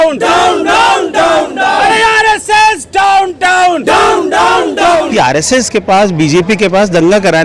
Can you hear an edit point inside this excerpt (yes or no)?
yes